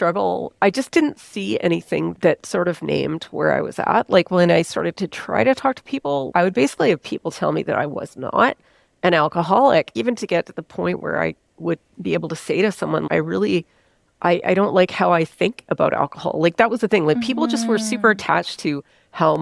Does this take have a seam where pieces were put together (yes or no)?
no